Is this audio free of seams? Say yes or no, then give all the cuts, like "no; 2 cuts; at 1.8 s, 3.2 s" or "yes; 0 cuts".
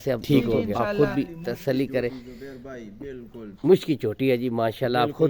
yes; 0 cuts